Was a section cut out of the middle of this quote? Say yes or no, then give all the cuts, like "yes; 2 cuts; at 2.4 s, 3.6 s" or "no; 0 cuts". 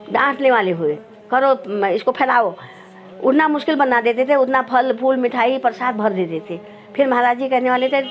no; 0 cuts